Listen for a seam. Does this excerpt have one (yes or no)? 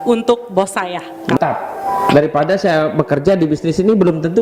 yes